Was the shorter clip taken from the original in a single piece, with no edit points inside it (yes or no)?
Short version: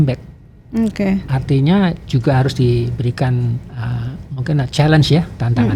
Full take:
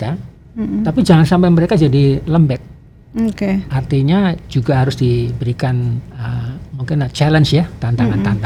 yes